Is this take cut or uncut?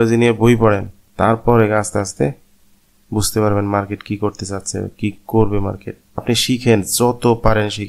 cut